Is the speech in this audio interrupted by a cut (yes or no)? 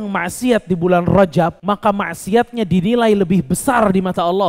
yes